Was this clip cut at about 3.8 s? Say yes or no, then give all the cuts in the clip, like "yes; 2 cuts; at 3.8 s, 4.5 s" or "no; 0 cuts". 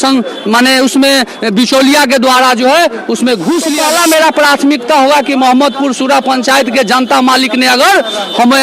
yes; 1 cut; at 3.8 s